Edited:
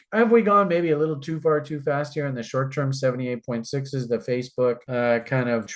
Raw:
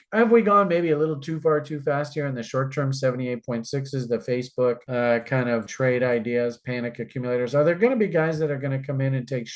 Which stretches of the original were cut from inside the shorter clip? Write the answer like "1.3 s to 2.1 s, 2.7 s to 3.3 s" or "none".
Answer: none